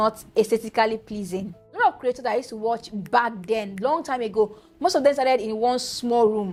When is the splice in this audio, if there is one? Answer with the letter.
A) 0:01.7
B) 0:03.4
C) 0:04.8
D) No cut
D